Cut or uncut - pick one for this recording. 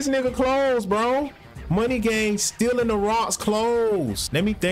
uncut